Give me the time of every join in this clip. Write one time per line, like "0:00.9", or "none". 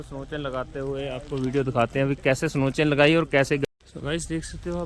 0:03.6